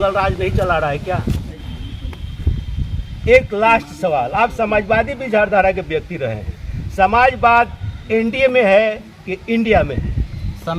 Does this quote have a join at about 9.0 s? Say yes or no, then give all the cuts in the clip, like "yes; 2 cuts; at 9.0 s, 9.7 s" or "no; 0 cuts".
no; 1 cut; at 1.5 s